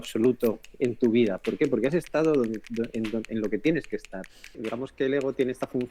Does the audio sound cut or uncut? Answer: cut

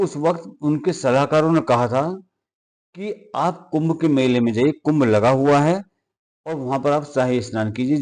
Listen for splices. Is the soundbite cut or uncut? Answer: uncut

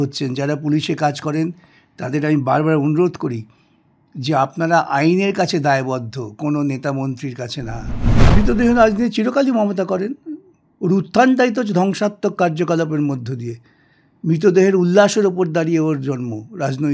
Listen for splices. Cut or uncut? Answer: cut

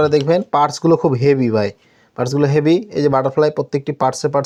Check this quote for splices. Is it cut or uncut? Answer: uncut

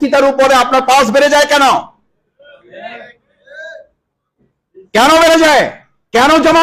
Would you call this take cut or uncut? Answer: uncut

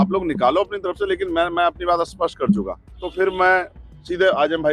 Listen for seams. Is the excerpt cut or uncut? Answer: cut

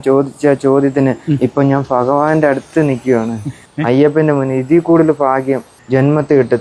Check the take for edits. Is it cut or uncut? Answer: uncut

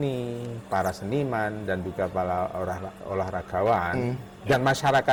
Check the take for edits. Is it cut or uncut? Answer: uncut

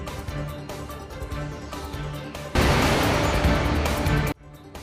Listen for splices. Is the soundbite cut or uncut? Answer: uncut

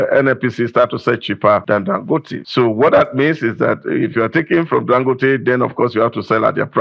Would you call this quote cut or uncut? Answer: cut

